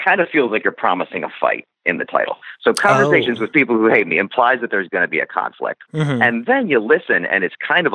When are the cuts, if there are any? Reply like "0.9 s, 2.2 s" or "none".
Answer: 3.5 s, 5.9 s